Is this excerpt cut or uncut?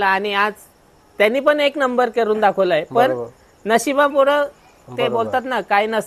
uncut